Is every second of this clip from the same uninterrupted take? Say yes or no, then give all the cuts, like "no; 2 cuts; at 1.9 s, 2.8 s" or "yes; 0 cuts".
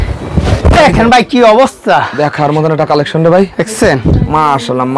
yes; 0 cuts